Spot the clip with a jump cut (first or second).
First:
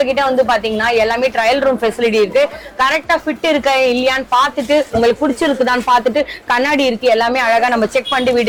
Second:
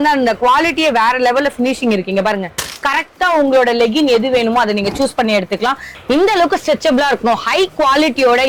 second